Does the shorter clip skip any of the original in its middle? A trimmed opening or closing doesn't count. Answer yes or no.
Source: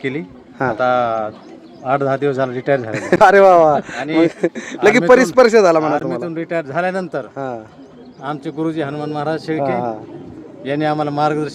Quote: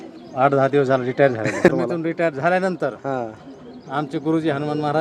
yes